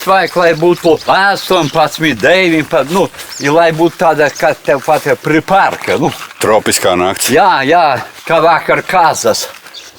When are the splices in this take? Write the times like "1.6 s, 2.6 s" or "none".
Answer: 1.0 s, 8.1 s